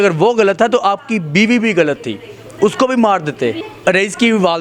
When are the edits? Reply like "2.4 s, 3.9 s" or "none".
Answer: 3.6 s